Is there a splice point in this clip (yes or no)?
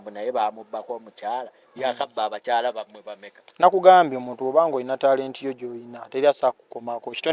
no